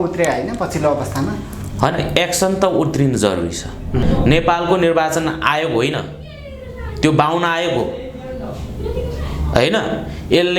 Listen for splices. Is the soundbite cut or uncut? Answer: cut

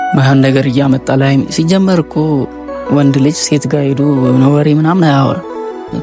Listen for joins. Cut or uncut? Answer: uncut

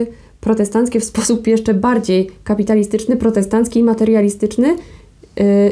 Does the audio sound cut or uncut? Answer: uncut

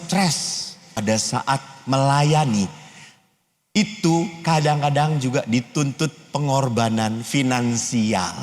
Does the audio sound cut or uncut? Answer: cut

